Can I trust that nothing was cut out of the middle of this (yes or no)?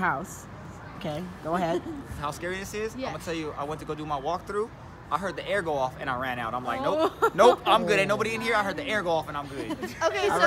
yes